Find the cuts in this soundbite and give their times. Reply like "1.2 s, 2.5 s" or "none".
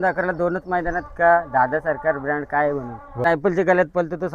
3.2 s